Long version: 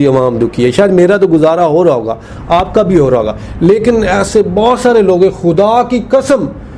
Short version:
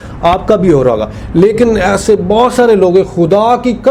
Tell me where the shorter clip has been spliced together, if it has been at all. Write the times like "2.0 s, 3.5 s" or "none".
none